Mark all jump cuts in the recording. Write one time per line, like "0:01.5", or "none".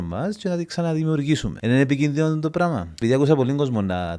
0:01.5
0:03.0